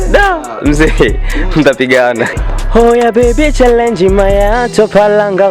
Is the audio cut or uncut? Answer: cut